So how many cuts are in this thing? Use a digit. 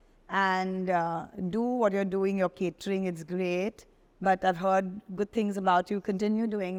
0